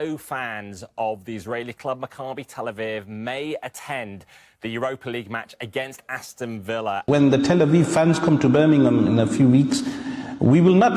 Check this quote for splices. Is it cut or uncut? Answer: cut